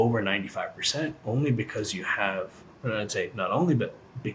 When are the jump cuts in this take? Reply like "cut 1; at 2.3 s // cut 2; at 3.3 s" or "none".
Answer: none